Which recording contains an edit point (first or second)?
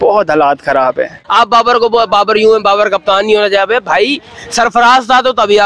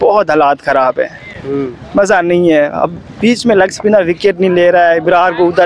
first